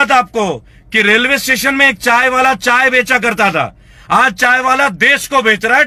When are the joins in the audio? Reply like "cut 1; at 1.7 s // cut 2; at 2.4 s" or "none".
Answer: none